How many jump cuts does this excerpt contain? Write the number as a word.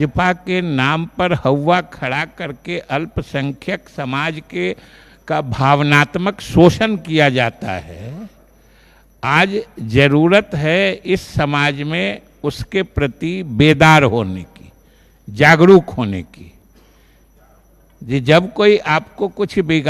zero